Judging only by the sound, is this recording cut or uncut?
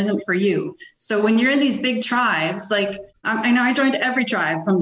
cut